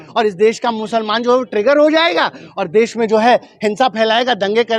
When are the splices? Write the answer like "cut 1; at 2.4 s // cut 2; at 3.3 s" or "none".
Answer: none